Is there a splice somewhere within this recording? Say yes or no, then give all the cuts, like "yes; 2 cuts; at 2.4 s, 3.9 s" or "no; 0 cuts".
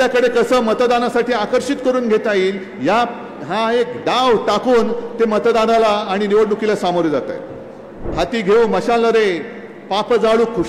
yes; 1 cut; at 8.1 s